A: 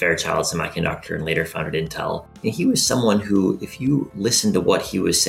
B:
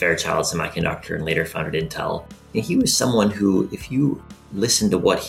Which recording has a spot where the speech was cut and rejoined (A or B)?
A